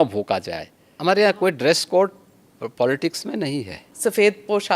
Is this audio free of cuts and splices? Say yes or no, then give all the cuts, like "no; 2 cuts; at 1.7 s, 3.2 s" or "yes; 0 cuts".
no; 2 cuts; at 1.0 s, 3.9 s